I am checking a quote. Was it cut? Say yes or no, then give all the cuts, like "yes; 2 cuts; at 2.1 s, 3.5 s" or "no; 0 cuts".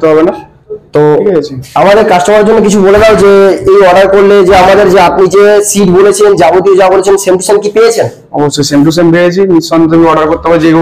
no; 0 cuts